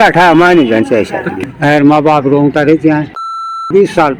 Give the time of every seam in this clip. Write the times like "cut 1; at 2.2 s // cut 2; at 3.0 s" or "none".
cut 1; at 1.5 s // cut 2; at 3.3 s